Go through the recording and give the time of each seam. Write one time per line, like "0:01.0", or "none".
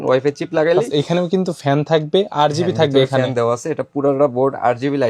none